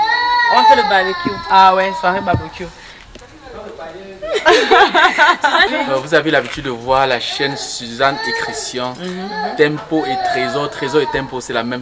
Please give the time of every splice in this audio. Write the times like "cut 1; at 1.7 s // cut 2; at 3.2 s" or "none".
cut 1; at 5.7 s

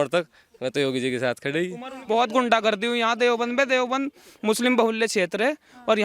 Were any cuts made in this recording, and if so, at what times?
cut 1; at 1.9 s

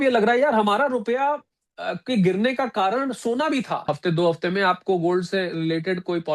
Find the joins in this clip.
cut 1; at 3.8 s

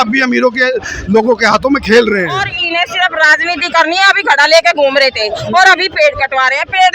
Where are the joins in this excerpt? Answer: cut 1; at 2.6 s

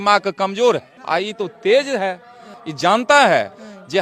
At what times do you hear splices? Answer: none

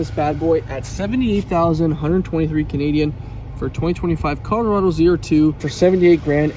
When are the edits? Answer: cut 1; at 5.7 s

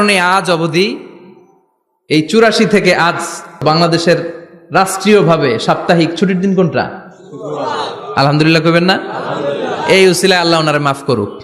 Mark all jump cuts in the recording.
cut 1; at 3.6 s

